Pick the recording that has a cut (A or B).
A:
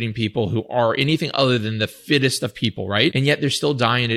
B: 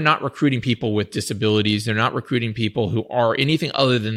A